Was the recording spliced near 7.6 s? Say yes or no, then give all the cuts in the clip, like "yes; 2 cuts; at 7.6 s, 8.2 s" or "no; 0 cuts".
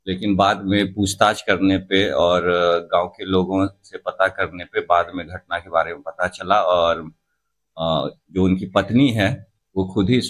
no; 0 cuts